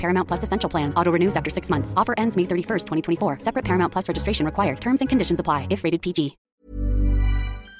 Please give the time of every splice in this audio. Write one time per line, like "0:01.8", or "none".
0:06.4